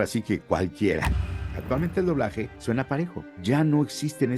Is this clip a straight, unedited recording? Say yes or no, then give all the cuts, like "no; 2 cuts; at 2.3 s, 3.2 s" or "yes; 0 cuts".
no; 3 cuts; at 1.3 s, 2.5 s, 3.3 s